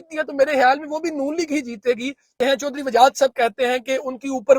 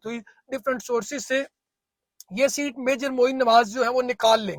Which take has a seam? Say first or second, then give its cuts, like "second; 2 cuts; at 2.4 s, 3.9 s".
first; 1 cut; at 2.3 s